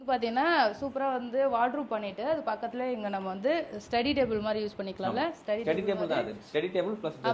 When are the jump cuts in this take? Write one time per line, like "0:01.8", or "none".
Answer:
none